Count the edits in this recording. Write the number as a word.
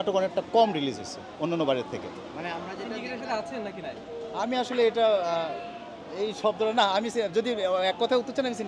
one